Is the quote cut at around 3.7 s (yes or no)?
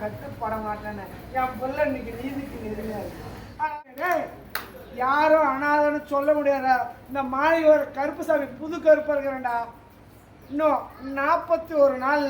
yes